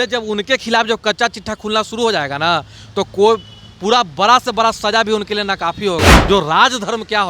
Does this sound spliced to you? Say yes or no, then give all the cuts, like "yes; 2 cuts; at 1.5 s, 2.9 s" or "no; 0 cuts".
yes; 1 cut; at 6.2 s